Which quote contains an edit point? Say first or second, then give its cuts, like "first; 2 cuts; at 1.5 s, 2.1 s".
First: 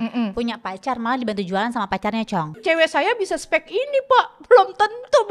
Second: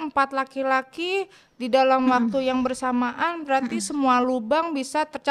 first; 1 cut; at 2.6 s